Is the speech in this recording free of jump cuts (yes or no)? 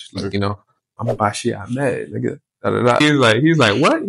no